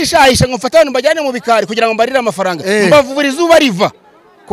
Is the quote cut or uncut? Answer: uncut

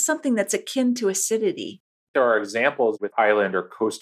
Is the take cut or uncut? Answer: cut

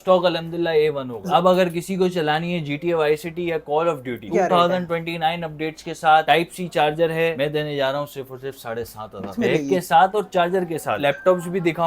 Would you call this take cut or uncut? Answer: cut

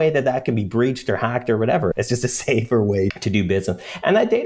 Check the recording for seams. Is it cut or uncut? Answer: cut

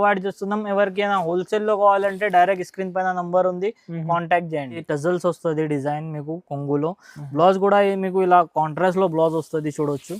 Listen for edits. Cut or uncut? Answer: cut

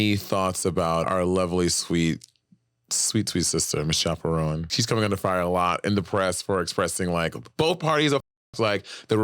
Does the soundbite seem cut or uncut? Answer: cut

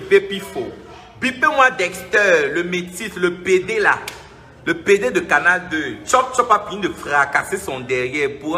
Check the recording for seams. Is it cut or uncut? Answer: uncut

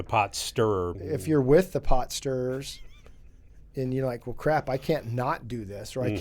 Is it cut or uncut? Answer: cut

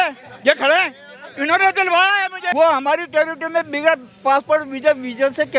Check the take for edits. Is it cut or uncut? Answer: cut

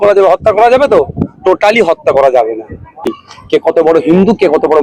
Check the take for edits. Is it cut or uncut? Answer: cut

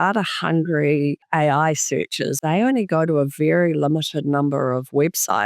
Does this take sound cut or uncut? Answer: cut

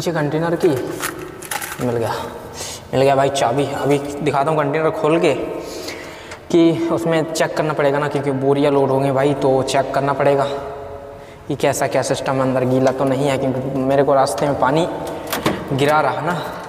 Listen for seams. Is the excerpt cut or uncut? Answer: uncut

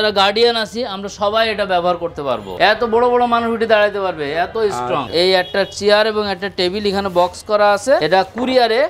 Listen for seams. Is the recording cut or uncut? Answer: cut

